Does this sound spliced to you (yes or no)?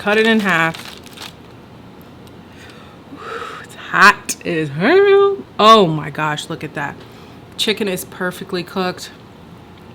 no